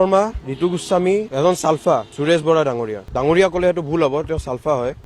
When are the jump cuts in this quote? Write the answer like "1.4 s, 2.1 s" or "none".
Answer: 1.3 s